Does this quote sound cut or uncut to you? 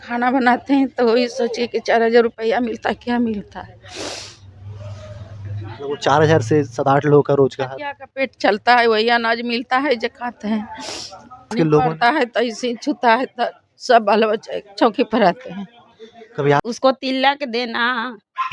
cut